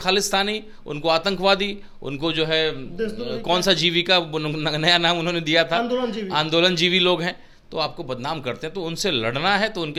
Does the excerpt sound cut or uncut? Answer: uncut